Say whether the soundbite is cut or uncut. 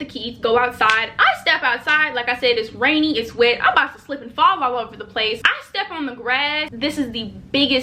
cut